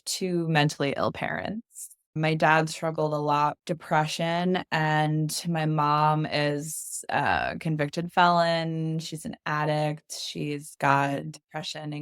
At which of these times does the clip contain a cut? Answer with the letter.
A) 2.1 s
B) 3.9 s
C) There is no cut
A